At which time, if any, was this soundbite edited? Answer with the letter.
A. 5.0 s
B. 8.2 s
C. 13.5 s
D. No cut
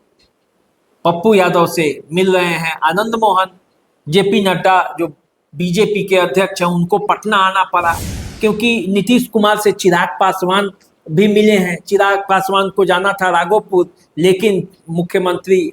B